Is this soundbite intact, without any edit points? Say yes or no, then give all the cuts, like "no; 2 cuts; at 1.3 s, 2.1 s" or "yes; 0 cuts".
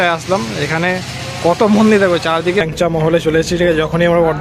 no; 1 cut; at 2.7 s